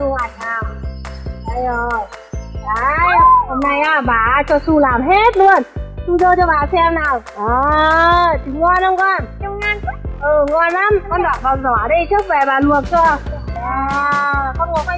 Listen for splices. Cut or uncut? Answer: cut